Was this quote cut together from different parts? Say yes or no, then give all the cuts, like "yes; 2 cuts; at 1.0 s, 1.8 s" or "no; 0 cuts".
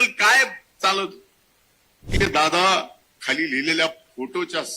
yes; 1 cut; at 2.1 s